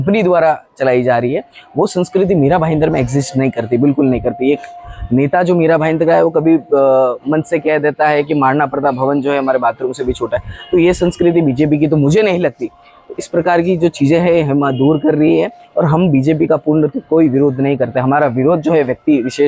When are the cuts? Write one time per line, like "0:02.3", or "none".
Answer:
none